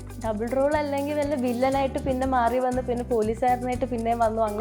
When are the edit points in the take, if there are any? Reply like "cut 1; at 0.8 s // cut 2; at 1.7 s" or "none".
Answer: none